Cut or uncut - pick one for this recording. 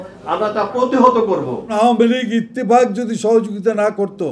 cut